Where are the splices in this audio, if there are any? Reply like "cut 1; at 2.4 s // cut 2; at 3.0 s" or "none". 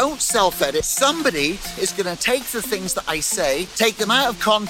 cut 1; at 0.9 s // cut 2; at 3.7 s